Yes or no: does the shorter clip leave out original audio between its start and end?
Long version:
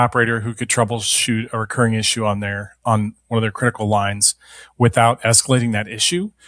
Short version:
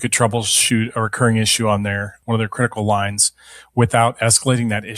yes